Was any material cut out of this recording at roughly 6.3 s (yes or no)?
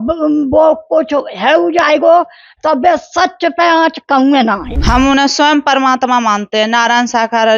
no